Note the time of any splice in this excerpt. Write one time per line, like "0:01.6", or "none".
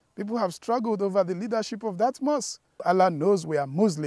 0:02.8